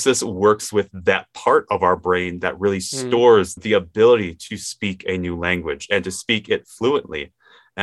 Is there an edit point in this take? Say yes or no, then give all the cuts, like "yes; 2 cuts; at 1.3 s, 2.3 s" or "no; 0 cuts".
no; 0 cuts